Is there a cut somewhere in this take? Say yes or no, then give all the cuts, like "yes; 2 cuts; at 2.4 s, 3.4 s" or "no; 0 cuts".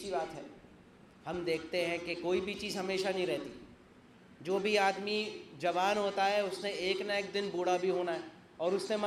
no; 0 cuts